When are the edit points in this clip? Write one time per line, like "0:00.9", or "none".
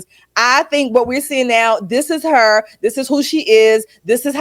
none

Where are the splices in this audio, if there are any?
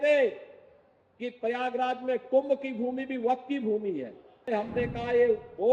0:04.5

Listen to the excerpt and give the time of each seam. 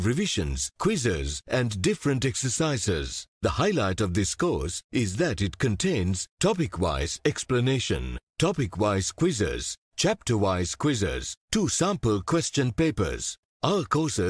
none

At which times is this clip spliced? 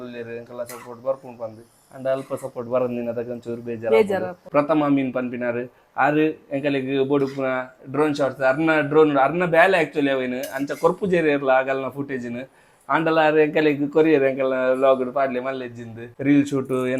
0:04.4
0:16.0

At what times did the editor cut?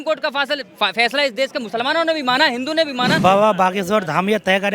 0:03.1

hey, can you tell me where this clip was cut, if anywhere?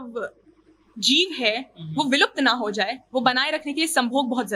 none

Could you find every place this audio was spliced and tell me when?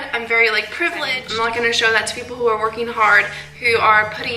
0:01.2

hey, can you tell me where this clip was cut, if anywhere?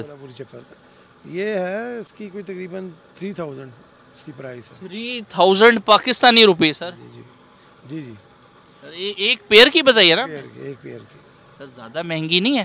none

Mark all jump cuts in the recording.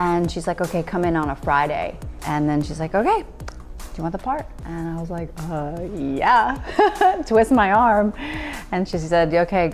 0:02.2
0:04.6

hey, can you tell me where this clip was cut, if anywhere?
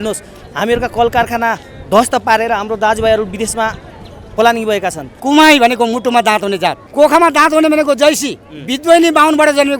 0:05.2
0:06.8

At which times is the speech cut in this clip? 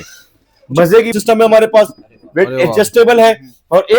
0:01.1

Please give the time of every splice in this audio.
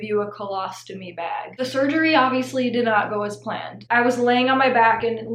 0:01.6
0:03.7

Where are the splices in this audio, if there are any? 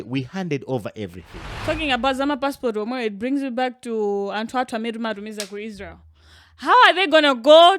0:01.5

